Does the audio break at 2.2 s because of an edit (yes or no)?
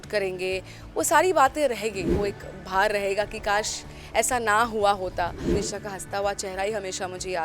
yes